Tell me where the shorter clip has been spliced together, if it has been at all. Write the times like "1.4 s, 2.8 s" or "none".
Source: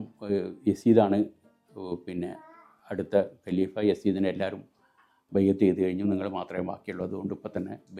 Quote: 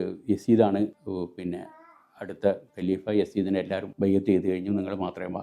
1.0 s, 3.9 s